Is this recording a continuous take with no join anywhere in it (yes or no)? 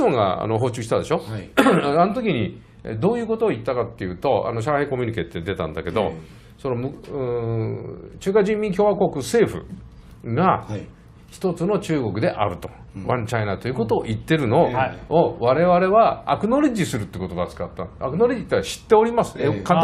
yes